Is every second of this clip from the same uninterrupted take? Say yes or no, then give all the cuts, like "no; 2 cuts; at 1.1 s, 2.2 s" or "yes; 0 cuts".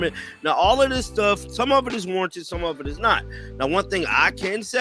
yes; 0 cuts